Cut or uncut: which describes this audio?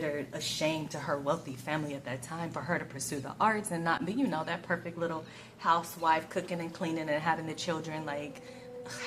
uncut